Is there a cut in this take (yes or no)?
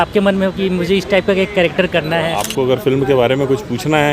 yes